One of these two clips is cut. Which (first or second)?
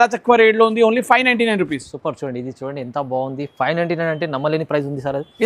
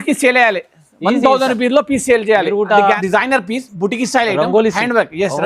second